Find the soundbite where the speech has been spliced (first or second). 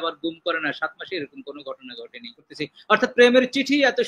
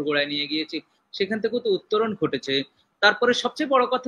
first